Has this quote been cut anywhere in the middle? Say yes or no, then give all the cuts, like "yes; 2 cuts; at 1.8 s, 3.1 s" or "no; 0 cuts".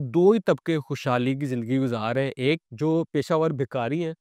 yes; 1 cut; at 2.7 s